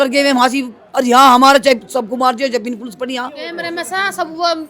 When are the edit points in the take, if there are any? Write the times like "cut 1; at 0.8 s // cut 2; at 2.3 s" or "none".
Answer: cut 1; at 3.6 s